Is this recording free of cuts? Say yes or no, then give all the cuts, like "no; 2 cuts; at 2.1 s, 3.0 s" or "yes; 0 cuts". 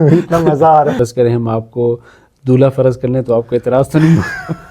no; 1 cut; at 1.0 s